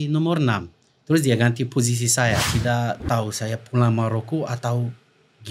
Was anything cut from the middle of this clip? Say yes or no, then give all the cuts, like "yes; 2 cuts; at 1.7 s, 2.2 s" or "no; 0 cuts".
yes; 1 cut; at 2.5 s